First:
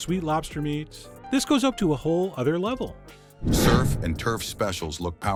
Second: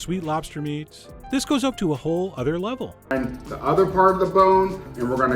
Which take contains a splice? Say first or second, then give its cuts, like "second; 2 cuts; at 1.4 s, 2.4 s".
second; 1 cut; at 2.9 s